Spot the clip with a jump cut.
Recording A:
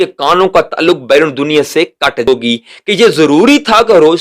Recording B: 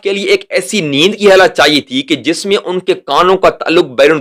A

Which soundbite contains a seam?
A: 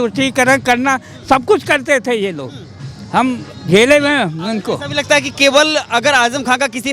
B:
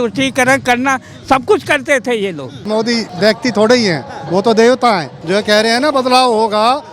B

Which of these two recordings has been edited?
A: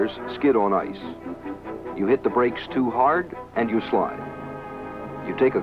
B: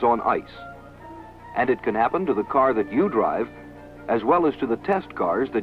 A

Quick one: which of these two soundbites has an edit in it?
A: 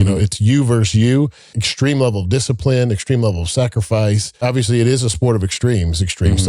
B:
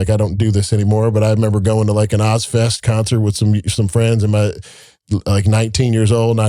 A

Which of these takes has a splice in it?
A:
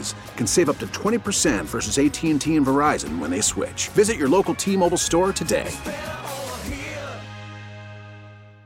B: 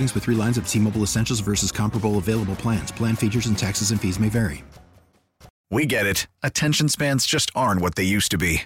B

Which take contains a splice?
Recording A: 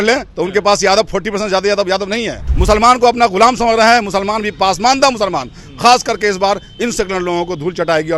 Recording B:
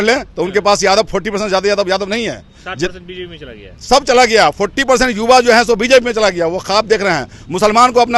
A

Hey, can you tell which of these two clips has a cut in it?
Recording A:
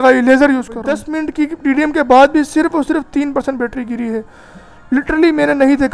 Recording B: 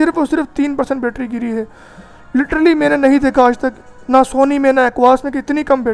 A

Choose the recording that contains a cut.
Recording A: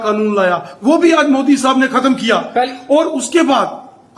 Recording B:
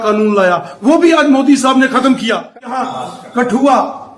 B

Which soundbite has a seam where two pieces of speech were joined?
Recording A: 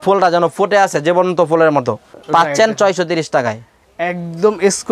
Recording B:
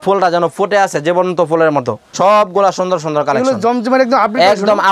B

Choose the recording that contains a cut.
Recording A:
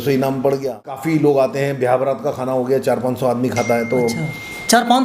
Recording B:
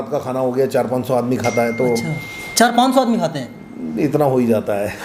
A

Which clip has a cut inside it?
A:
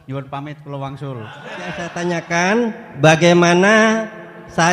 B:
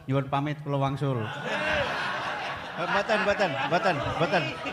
A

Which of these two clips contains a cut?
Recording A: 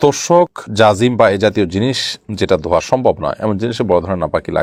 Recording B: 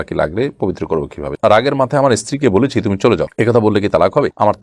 B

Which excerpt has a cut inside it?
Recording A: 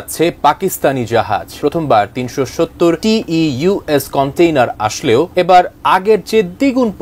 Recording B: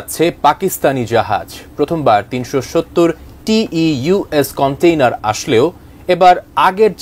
A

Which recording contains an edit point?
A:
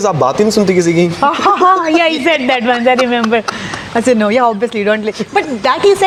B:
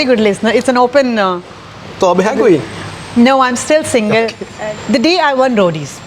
B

